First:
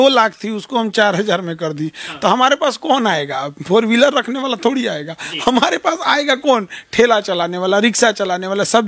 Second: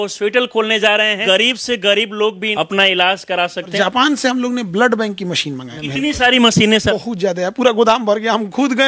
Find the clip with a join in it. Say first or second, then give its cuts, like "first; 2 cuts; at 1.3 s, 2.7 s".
second; 5 cuts; at 1.2 s, 2.4 s, 3.7 s, 5.7 s, 6.9 s